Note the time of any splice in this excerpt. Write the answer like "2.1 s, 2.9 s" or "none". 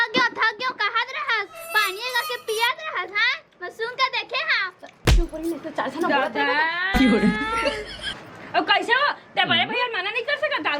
none